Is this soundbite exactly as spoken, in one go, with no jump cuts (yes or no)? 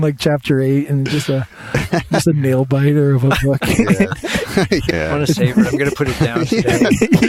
no